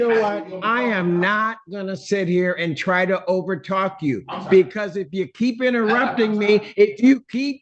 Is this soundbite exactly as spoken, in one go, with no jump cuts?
yes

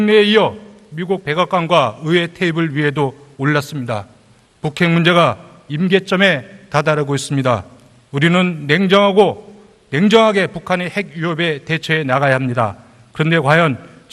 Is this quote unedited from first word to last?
no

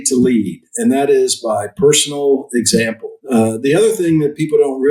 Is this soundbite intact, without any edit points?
yes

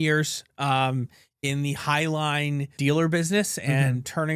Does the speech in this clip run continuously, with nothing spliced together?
no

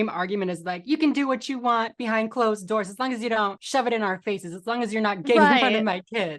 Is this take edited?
no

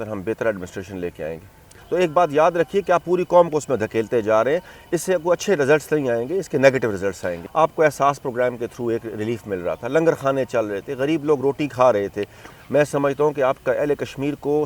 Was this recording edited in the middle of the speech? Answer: yes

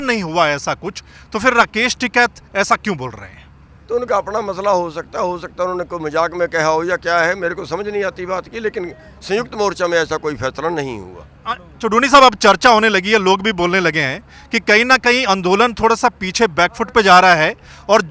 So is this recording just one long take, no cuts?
yes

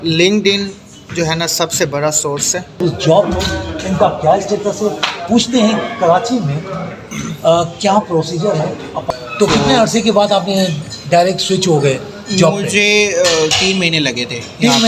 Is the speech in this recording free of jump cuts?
no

